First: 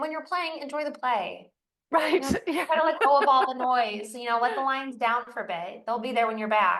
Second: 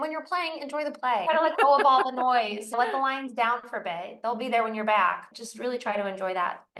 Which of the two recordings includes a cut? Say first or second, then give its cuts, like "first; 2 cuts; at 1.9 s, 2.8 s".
second; 3 cuts; at 1.2 s, 2.8 s, 5.3 s